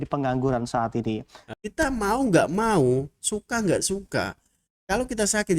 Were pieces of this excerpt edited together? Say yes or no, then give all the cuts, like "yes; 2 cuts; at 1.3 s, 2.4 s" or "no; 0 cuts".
yes; 1 cut; at 1.4 s